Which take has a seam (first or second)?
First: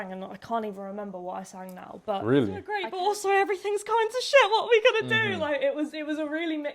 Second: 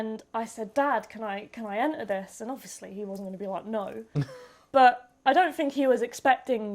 first